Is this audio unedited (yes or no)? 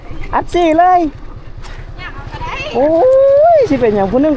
yes